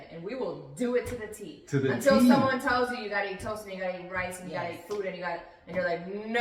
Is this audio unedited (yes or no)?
yes